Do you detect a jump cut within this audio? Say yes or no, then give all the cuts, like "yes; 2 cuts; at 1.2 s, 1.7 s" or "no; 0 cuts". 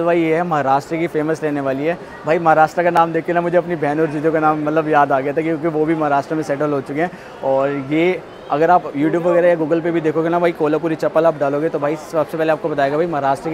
no; 0 cuts